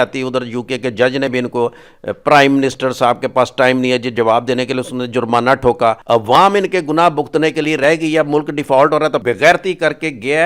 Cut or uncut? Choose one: cut